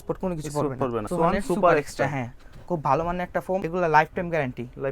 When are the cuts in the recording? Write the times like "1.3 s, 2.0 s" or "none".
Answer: 1.1 s, 3.7 s